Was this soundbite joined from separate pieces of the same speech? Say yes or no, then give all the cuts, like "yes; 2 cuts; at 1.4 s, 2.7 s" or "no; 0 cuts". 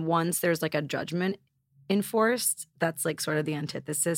yes; 1 cut; at 2.6 s